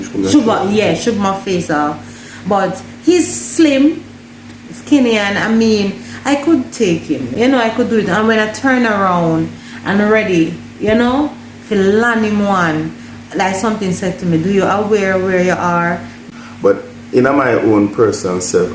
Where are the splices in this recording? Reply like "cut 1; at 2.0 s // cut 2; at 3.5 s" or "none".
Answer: cut 1; at 7.3 s // cut 2; at 16.1 s